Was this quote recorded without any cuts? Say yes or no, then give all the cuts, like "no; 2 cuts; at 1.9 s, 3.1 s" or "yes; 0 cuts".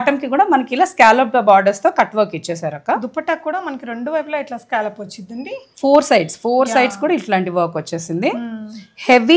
yes; 0 cuts